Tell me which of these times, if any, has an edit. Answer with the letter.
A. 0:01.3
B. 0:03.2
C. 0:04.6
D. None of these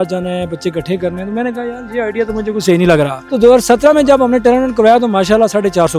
B